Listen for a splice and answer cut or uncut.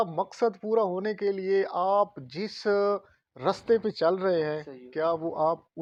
uncut